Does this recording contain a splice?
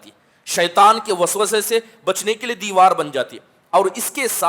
no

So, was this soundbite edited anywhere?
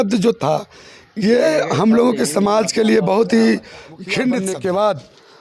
yes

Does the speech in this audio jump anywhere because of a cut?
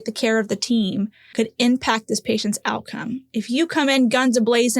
yes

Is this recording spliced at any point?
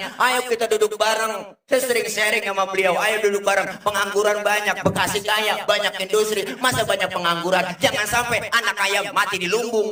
no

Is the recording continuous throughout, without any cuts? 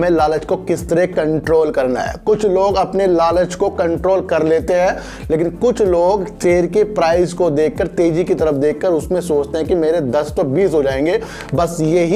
yes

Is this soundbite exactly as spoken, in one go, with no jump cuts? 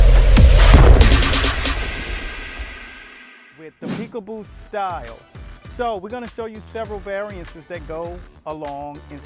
no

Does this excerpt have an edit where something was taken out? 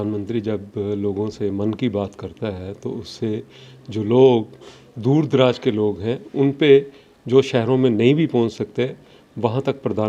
no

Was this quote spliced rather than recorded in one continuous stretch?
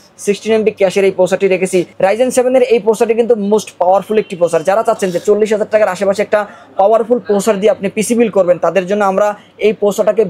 no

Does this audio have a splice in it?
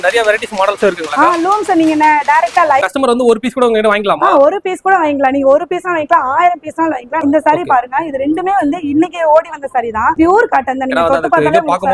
yes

